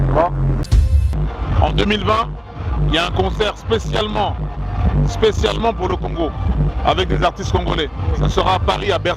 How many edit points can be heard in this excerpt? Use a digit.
1